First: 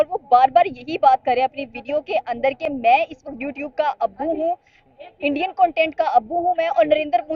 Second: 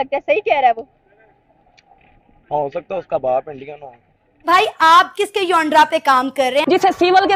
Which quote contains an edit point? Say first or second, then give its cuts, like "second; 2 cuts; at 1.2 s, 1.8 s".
second; 2 cuts; at 4.4 s, 6.6 s